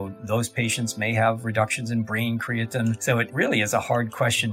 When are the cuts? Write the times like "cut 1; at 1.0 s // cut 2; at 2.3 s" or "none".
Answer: cut 1; at 3.2 s